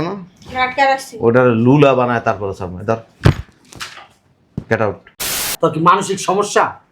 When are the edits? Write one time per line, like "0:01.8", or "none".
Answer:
0:05.5

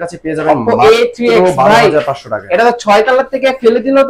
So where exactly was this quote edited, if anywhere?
none

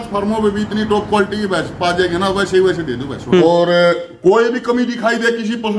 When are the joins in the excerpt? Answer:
0:03.4

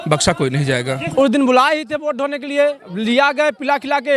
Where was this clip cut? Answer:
0:01.0

